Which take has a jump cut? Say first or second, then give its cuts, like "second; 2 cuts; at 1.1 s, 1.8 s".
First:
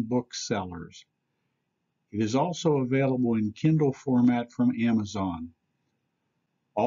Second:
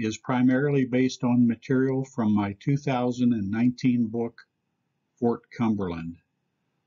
second; 1 cut; at 2.9 s